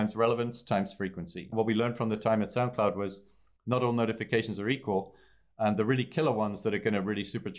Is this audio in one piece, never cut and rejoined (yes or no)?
no